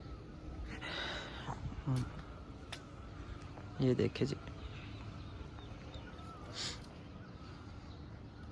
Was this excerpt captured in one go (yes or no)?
yes